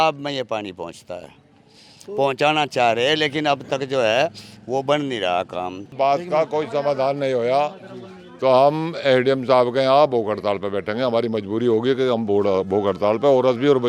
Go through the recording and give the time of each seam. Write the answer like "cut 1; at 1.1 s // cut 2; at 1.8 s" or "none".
cut 1; at 5.8 s